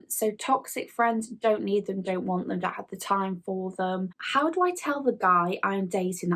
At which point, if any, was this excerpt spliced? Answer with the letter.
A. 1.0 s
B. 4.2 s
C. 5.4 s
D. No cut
B